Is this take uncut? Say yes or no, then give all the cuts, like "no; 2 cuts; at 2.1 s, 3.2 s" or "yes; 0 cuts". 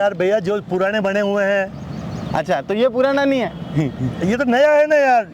yes; 0 cuts